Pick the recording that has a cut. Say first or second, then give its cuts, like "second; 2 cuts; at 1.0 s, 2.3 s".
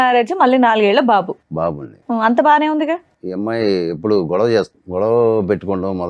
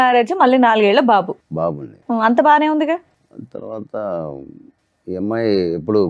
first; 2 cuts; at 3.2 s, 4.8 s